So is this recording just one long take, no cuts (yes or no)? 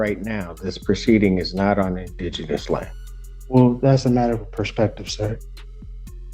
yes